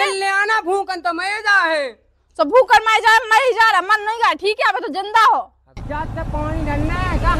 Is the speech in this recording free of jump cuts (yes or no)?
no